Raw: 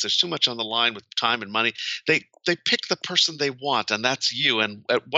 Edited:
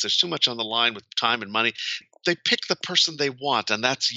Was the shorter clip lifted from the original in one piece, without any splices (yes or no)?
no